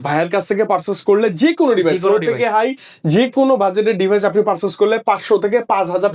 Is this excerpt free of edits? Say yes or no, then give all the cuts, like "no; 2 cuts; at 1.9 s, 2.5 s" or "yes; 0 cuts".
yes; 0 cuts